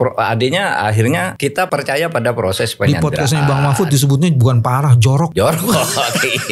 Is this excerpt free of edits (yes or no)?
no